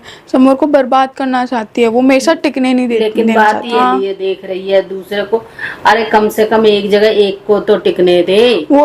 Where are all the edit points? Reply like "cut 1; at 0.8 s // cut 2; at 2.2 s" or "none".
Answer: cut 1; at 3.8 s